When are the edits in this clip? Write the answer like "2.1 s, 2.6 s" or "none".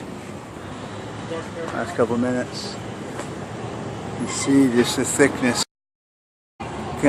none